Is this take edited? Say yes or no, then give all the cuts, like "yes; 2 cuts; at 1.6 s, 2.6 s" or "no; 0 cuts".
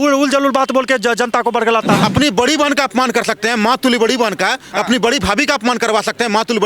yes; 1 cut; at 2.0 s